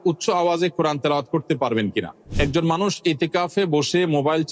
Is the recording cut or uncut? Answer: cut